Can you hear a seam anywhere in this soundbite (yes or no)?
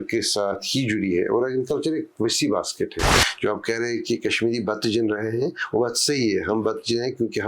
yes